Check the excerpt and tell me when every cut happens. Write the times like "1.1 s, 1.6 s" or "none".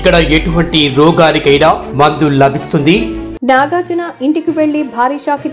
3.3 s